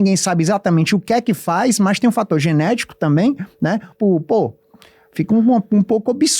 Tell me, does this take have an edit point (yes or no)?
yes